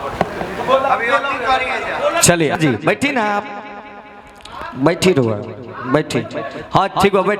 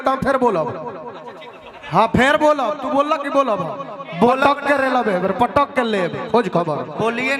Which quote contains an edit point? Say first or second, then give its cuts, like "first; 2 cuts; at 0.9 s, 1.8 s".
first; 1 cut; at 2.5 s